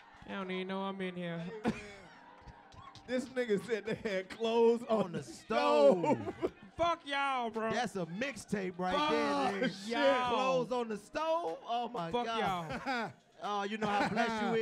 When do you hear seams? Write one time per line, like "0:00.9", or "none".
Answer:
none